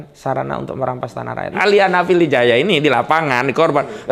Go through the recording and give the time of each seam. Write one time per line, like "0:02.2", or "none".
0:01.5